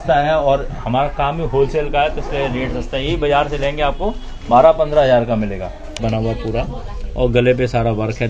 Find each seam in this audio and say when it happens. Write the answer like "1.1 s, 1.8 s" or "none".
6.0 s

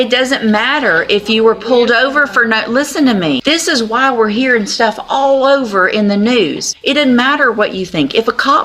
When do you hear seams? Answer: 3.4 s, 6.7 s

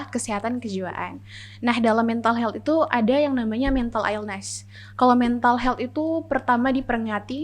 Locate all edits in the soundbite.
none

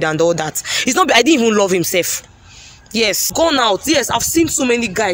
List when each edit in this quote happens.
3.3 s

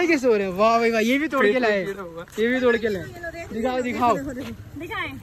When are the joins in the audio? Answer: none

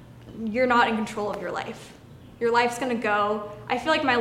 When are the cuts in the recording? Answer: none

